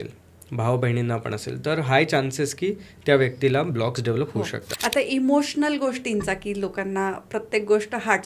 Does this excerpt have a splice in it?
yes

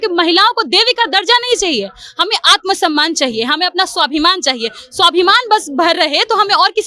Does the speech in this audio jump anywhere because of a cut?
no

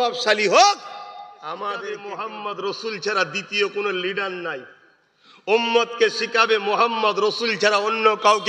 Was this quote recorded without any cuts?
no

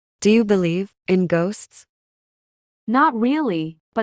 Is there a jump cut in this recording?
no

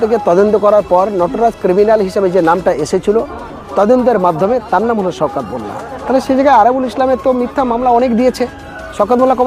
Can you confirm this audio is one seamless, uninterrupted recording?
yes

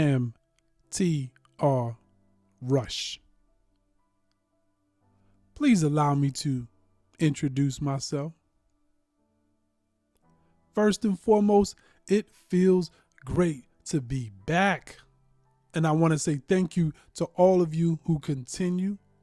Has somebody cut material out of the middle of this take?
yes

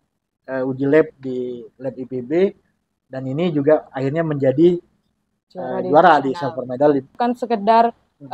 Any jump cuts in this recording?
yes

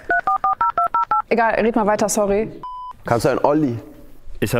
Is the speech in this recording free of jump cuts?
no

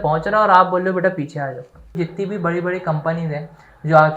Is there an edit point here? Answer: yes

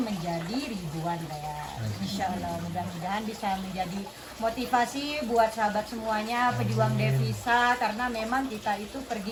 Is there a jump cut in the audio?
no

